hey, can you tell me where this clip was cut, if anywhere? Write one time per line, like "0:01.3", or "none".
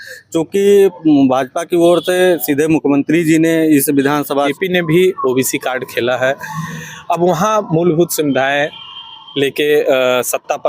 0:04.3